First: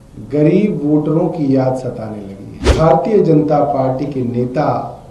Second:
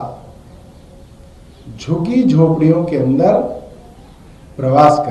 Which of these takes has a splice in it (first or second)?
first